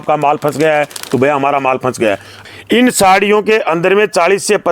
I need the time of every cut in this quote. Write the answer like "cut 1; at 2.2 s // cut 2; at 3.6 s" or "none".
cut 1; at 2.3 s